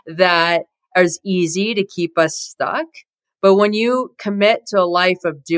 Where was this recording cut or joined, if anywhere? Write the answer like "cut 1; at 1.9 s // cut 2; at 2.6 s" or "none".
none